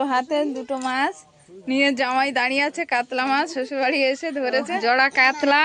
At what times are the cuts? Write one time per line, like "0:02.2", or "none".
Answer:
0:04.7